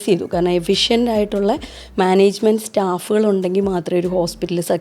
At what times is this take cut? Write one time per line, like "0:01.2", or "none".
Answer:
none